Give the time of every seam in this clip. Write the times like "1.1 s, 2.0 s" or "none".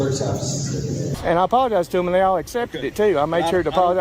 1.2 s